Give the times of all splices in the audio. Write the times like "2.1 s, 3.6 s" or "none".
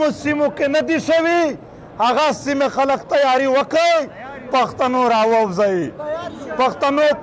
none